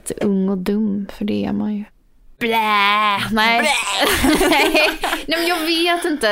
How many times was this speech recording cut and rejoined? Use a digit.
1